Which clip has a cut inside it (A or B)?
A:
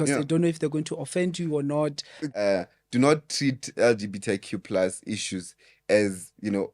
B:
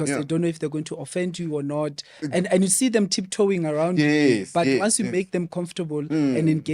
A